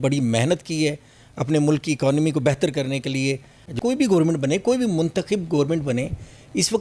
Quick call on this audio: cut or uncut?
cut